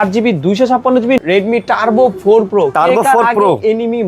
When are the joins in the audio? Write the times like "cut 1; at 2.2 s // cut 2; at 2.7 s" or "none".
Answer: cut 1; at 1.2 s